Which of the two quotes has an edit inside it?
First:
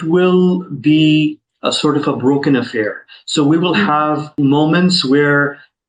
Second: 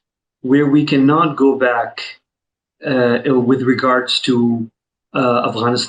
first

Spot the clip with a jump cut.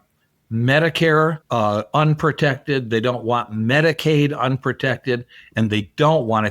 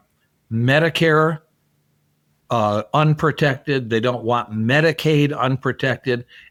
first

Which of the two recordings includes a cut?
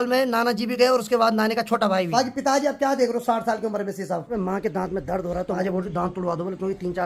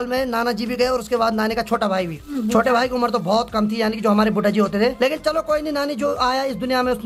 first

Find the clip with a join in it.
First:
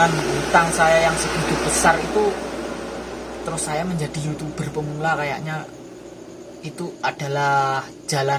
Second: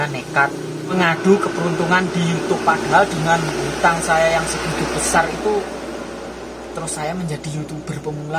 second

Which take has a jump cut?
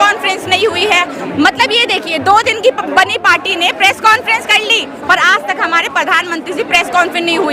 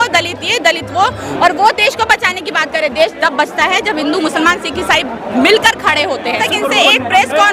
second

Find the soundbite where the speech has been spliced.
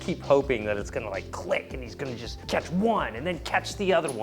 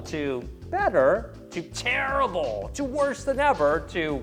first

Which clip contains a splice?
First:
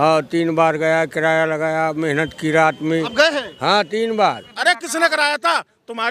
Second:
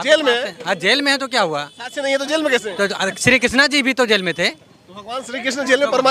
first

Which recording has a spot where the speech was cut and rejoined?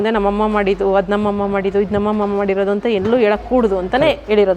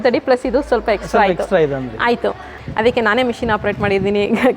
second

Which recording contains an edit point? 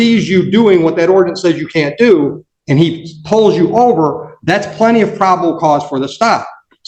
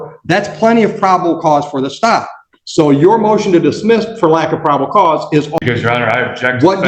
second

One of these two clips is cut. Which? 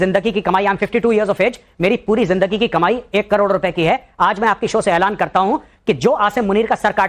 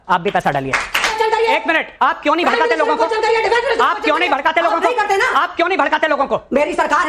second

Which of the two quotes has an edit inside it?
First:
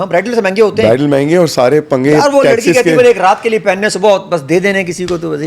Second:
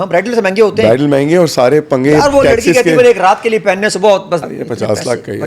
second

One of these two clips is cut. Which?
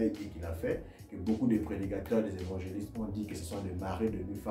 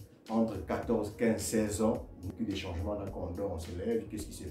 second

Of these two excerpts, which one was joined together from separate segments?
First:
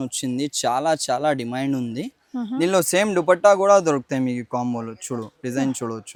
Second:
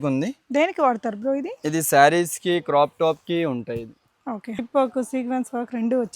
second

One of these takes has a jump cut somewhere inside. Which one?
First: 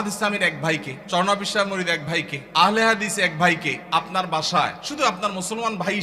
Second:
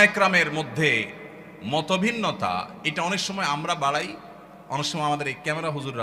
first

